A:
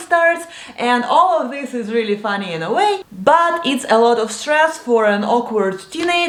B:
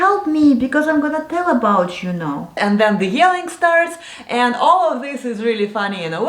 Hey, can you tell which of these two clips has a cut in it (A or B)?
B